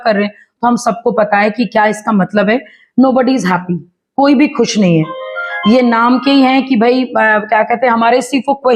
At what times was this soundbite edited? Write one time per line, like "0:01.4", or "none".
none